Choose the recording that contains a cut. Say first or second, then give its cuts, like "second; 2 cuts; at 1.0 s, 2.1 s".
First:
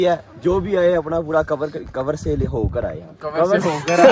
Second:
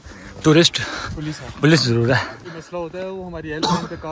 first; 1 cut; at 3.2 s